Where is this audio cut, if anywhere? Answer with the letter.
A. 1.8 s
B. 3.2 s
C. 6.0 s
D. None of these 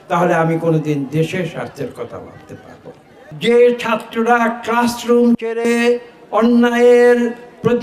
B